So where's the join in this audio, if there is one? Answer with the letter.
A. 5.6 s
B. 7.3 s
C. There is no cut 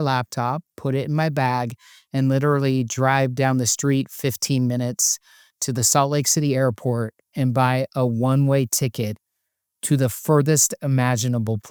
C